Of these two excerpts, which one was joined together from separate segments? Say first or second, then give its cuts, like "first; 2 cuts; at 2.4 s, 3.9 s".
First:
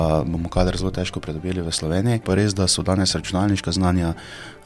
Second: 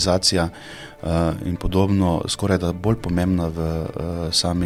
first; 1 cut; at 2.2 s